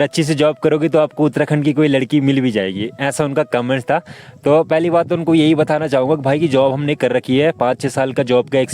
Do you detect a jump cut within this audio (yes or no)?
no